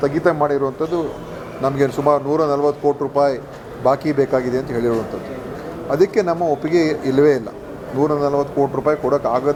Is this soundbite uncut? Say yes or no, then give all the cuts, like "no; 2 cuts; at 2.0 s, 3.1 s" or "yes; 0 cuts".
yes; 0 cuts